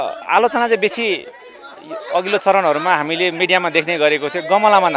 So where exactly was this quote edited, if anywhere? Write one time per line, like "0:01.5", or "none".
none